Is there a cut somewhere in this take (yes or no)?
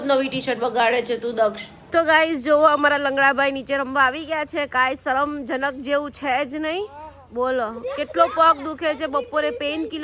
yes